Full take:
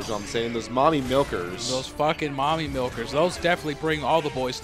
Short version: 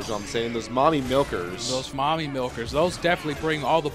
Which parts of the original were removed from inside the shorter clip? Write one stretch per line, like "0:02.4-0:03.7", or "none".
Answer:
0:01.9-0:02.3